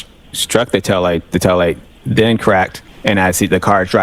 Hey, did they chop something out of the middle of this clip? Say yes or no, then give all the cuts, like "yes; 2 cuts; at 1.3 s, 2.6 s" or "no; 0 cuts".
yes; 1 cut; at 2.8 s